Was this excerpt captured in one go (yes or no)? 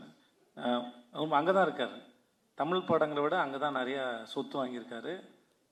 yes